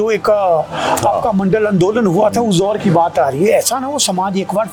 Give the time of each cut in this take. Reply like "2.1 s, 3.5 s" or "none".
none